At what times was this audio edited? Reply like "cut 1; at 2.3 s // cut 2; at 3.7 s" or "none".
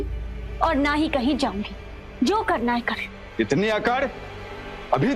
none